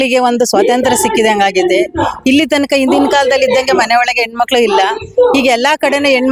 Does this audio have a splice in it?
no; 0 cuts

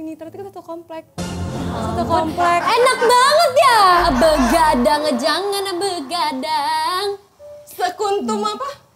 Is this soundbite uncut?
no; 1 cut; at 4.0 s

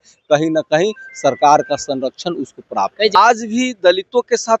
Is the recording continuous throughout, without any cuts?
no; 1 cut; at 3.1 s

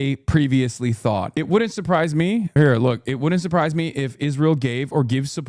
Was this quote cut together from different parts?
yes; 2 cuts; at 1.3 s, 2.5 s

